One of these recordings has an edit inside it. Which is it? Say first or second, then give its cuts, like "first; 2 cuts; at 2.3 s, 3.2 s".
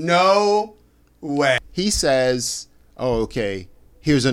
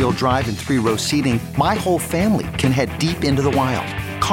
first; 1 cut; at 1.7 s